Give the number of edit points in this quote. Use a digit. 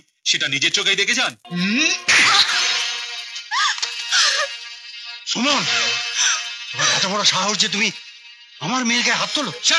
1